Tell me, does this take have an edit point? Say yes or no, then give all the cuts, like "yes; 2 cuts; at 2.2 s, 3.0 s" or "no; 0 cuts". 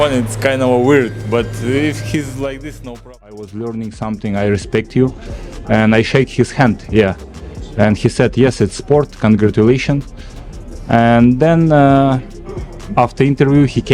yes; 1 cut; at 3.1 s